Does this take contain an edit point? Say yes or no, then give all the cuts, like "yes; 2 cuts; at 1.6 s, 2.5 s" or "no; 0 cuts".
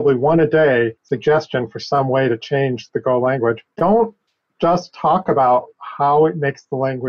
yes; 2 cuts; at 1.1 s, 3.7 s